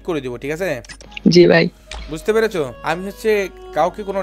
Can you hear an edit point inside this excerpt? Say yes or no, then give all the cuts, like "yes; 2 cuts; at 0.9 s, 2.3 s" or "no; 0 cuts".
yes; 1 cut; at 2.8 s